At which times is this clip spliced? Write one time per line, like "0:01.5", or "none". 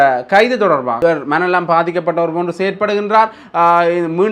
0:01.0